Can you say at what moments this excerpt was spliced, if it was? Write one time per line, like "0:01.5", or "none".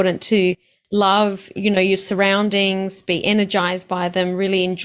none